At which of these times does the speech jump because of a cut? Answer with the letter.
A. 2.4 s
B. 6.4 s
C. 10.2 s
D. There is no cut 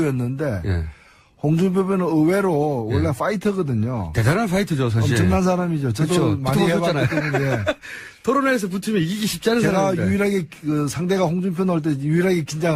A